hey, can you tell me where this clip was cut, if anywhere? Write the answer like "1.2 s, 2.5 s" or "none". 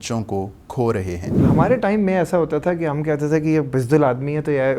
1.5 s